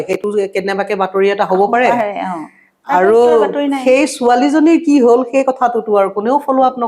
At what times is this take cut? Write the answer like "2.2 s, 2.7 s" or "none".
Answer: none

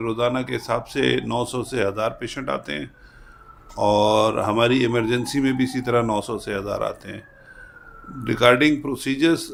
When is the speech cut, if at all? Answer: none

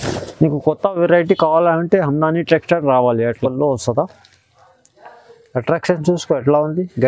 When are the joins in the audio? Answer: 3.4 s

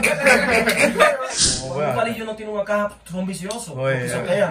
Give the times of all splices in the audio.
1.5 s

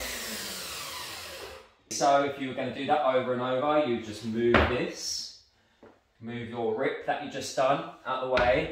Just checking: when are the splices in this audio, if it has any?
1.9 s

